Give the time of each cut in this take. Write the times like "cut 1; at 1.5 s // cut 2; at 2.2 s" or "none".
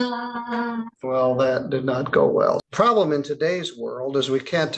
cut 1; at 0.9 s // cut 2; at 2.6 s